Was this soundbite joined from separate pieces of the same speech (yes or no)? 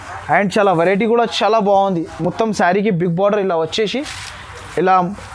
no